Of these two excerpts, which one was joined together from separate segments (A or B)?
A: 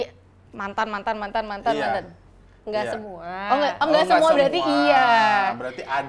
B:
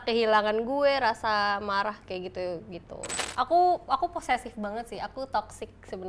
B